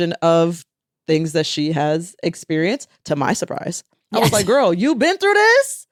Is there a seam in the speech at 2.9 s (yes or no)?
no